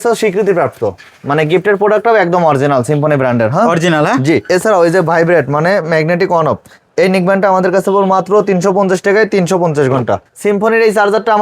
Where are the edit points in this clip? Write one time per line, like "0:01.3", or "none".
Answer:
0:04.4
0:10.2